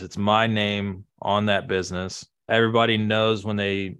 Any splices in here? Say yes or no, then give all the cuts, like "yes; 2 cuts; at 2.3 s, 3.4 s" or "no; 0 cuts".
yes; 1 cut; at 2.5 s